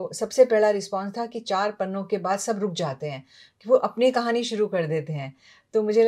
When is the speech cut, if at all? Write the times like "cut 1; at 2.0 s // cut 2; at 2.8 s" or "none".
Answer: none